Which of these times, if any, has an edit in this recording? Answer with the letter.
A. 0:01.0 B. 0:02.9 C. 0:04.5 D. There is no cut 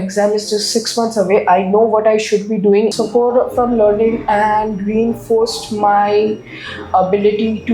B